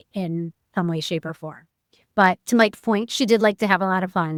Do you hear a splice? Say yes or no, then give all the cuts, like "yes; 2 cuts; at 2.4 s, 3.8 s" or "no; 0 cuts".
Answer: no; 0 cuts